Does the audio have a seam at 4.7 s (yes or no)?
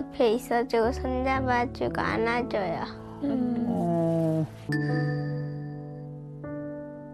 yes